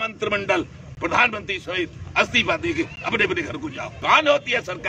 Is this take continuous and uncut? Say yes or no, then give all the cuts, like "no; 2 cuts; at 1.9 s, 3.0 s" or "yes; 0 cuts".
no; 1 cut; at 3.9 s